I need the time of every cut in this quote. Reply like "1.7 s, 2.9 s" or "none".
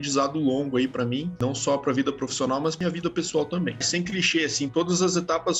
2.8 s, 3.8 s